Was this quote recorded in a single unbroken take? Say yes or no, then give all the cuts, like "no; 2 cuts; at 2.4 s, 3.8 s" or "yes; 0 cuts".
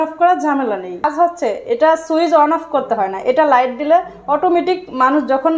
no; 1 cut; at 1.1 s